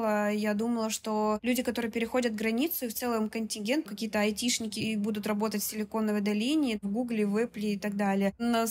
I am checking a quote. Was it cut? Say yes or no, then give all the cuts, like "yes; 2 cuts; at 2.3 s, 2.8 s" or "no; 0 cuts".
no; 0 cuts